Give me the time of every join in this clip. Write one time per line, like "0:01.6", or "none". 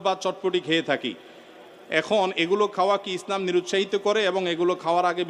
none